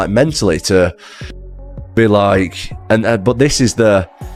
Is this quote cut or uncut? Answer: uncut